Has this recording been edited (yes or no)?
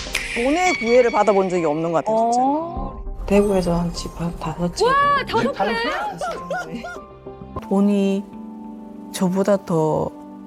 yes